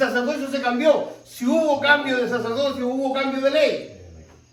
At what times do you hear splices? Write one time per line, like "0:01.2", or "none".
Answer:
none